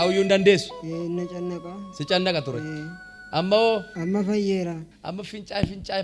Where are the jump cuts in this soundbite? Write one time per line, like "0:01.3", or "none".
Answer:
0:03.9
0:04.9

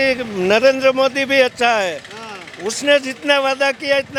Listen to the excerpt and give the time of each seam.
none

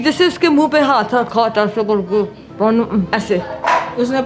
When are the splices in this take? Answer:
0:03.1

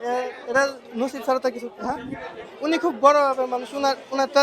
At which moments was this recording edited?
0:02.4

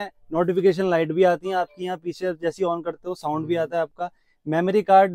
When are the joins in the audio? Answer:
none

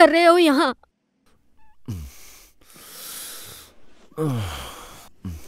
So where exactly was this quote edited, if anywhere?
none

